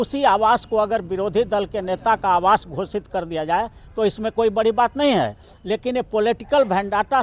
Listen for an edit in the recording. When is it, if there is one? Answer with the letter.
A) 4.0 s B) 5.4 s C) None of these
C